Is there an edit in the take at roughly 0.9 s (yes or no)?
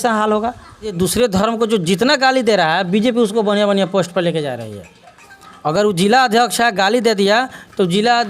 yes